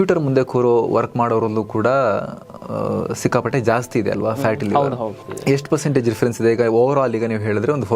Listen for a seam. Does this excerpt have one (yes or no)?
yes